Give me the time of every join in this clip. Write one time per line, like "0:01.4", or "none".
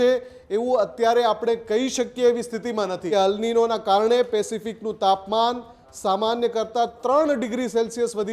0:03.0